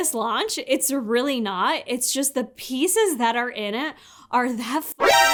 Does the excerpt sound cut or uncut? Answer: uncut